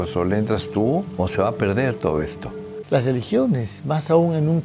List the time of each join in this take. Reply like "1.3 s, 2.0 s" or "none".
2.7 s